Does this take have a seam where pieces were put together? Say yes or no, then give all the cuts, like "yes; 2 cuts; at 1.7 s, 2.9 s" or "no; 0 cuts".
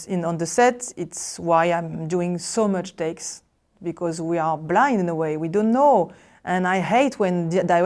no; 0 cuts